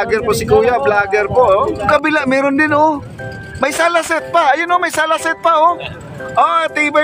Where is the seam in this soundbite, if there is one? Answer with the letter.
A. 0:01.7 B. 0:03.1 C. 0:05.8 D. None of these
A